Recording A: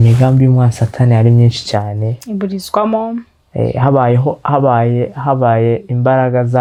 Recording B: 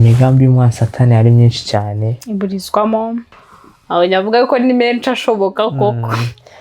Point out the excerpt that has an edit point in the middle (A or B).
B